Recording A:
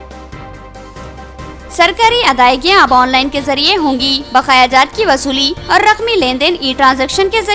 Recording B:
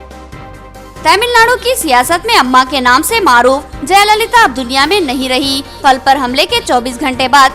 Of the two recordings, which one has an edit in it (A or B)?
B